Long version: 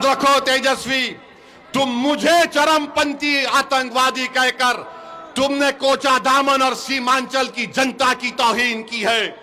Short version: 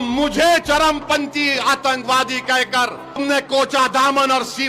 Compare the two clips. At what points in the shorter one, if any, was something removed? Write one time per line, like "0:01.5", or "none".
0:03.2